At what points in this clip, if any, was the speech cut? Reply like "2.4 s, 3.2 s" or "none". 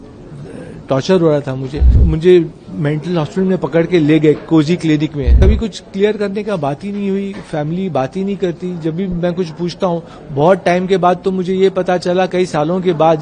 2.0 s, 5.4 s